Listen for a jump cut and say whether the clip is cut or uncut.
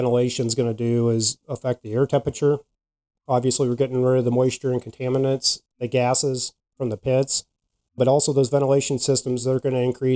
cut